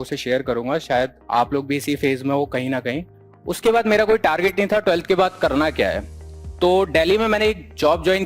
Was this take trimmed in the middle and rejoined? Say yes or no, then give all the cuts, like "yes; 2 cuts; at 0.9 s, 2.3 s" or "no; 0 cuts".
yes; 1 cut; at 3.1 s